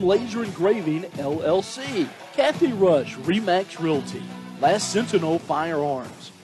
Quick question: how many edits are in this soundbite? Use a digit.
1